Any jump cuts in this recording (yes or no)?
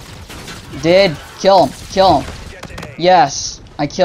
no